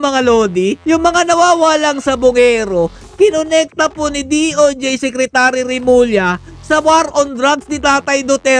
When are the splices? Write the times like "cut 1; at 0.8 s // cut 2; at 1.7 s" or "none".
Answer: none

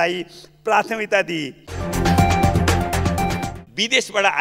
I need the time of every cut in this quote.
cut 1; at 2.0 s // cut 2; at 3.5 s

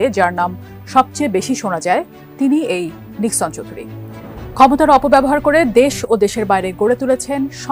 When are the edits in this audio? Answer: none

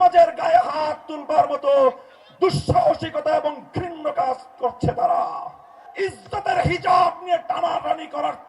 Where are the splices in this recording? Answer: cut 1; at 5.8 s

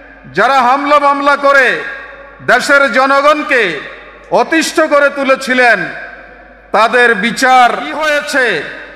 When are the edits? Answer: cut 1; at 8.0 s

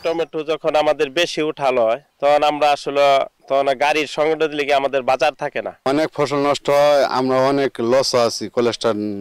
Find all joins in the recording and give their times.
cut 1; at 2.1 s // cut 2; at 3.4 s // cut 3; at 5.8 s

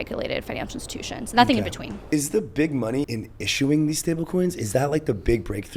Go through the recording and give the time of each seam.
cut 1; at 1.9 s // cut 2; at 3.1 s

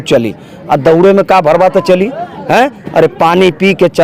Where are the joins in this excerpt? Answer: none

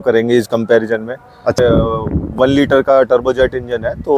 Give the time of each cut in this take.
cut 1; at 1.6 s

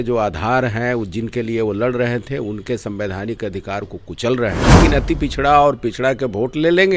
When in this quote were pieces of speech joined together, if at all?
cut 1; at 4.8 s

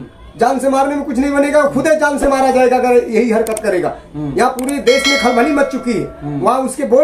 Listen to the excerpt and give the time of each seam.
none

